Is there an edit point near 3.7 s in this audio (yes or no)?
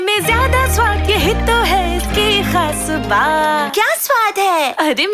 yes